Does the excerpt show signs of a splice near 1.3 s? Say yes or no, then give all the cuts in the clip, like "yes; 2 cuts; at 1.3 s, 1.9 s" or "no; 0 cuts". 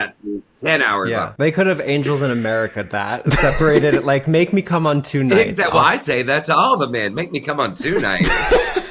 yes; 2 cuts; at 1.3 s, 5.5 s